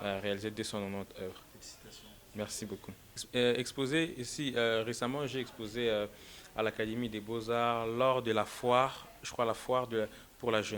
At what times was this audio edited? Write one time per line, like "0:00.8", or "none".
0:03.2